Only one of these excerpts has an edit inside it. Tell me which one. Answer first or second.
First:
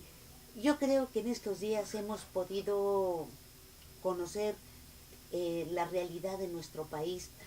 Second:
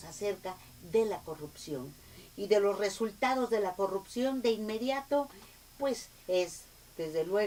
first